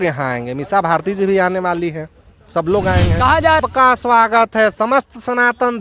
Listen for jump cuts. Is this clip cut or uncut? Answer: cut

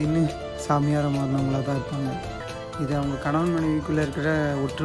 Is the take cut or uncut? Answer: cut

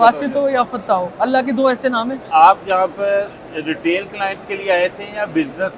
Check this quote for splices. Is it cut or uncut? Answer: cut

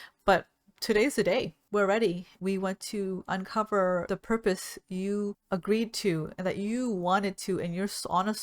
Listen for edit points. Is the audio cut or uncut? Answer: cut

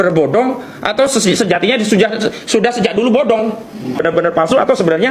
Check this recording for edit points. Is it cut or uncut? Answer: cut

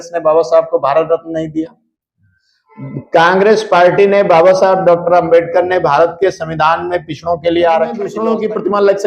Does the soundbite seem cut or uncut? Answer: cut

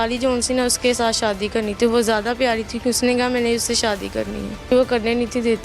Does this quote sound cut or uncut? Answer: cut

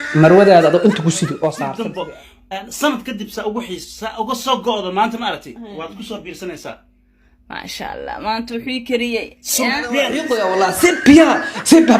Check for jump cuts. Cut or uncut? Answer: cut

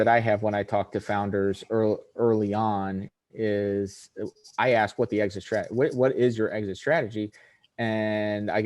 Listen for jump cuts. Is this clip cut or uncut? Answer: uncut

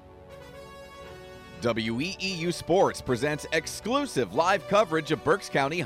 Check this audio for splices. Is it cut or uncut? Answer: cut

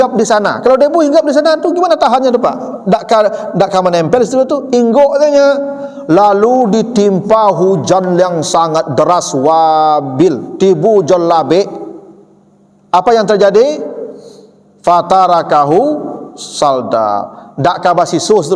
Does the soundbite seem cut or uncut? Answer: uncut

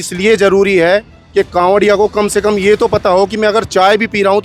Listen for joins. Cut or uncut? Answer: uncut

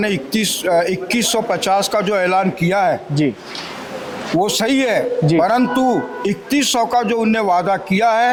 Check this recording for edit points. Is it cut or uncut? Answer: uncut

